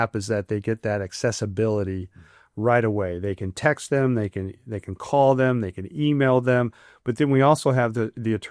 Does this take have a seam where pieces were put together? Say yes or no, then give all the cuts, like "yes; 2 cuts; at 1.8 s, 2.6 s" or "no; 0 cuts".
no; 0 cuts